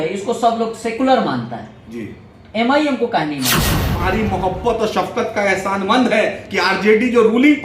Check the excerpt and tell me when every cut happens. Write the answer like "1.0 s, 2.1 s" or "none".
3.9 s